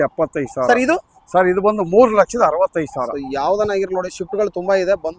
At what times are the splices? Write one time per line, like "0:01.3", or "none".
none

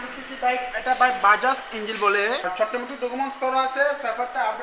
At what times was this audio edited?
0:02.8

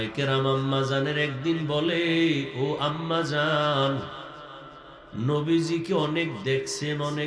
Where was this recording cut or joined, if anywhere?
none

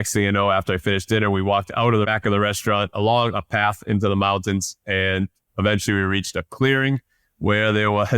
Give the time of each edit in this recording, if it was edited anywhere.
0:02.1

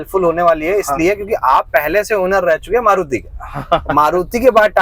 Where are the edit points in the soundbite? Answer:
none

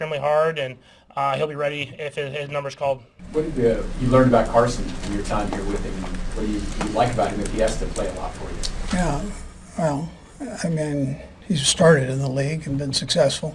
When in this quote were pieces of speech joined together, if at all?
0:03.1

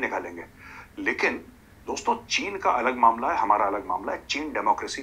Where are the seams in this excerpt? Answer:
none

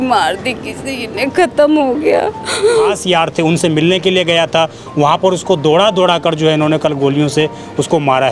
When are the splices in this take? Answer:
0:03.0

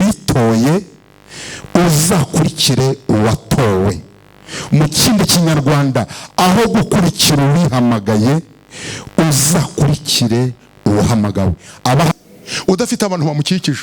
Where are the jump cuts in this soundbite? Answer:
0:12.1

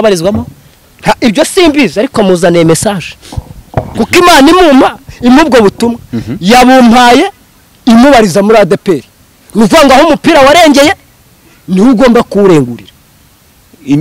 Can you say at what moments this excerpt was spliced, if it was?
none

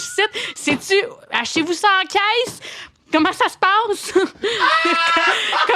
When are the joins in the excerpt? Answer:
0:04.3

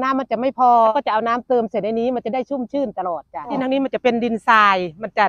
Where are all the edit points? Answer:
0:00.9
0:03.5

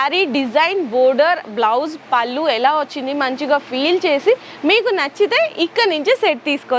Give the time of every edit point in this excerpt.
none

